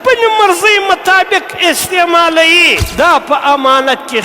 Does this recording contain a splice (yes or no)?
yes